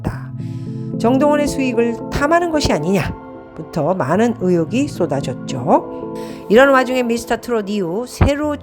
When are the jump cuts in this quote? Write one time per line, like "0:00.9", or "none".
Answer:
0:06.3